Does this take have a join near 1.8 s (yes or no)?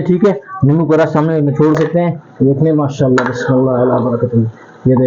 yes